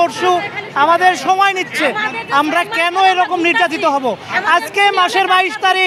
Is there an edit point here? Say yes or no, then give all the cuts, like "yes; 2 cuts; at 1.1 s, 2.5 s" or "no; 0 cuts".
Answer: no; 0 cuts